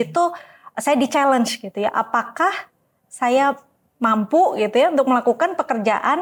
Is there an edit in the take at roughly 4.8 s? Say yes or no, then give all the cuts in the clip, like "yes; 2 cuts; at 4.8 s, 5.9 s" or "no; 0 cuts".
no; 0 cuts